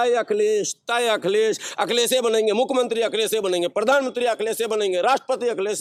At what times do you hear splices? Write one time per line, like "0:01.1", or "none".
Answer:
none